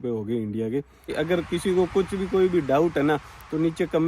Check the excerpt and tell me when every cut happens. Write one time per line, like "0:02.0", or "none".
0:01.1